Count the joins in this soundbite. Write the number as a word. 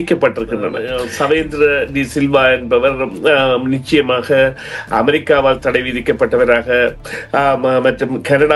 one